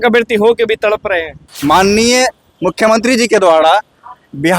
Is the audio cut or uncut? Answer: cut